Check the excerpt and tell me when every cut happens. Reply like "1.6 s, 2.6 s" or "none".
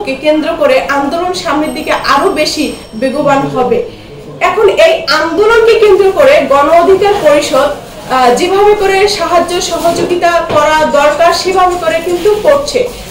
none